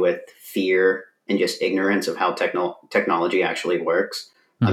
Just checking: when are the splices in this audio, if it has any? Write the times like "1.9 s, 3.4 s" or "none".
none